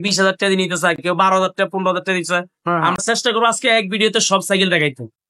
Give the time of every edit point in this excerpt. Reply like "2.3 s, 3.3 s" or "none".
none

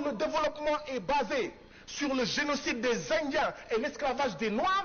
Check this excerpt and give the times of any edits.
none

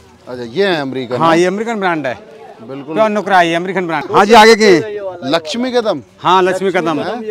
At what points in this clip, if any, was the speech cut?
4.0 s

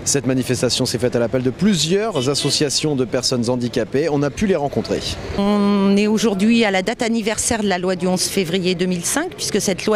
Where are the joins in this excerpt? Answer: 8.0 s

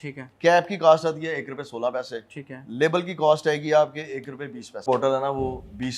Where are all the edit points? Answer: 4.8 s

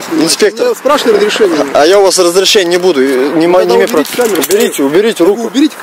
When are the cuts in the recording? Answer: none

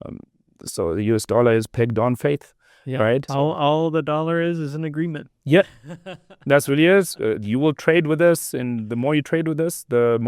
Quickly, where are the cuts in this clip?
3.3 s

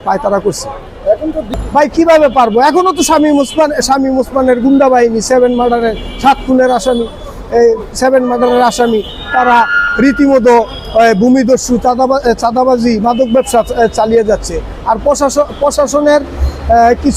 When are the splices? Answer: none

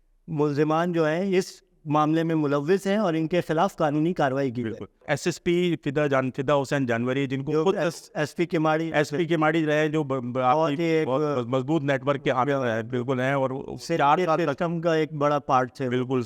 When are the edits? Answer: 5.0 s

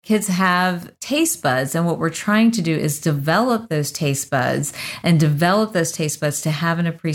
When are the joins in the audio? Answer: 0.9 s

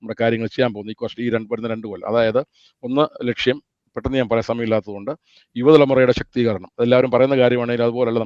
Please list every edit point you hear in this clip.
none

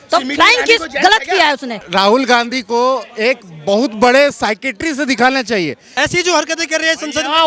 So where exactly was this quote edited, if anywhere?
1.7 s, 5.8 s

